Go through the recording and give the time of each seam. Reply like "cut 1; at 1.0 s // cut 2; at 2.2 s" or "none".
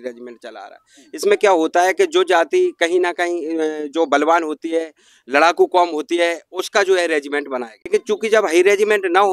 cut 1; at 7.8 s